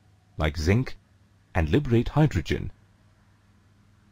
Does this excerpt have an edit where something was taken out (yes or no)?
no